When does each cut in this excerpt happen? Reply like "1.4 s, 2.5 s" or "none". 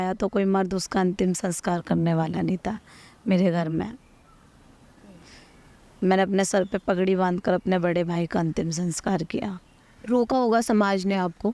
none